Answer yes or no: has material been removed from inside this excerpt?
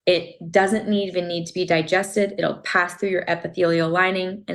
no